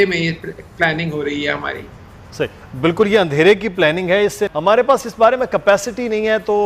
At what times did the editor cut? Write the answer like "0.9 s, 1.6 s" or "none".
4.5 s